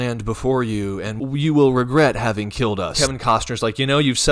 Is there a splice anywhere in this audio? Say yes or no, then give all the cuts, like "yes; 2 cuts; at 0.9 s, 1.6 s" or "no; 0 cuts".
yes; 2 cuts; at 1.1 s, 2.9 s